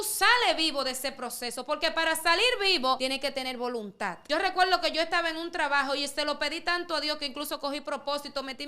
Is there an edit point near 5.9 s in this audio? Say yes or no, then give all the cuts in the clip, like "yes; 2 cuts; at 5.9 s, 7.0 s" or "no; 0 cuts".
no; 2 cuts; at 3.0 s, 4.2 s